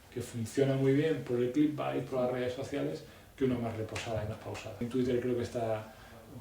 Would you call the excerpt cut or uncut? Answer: cut